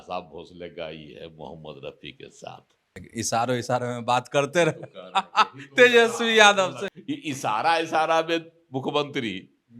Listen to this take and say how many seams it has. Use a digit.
2